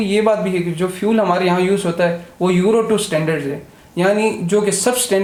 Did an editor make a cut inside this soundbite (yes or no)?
no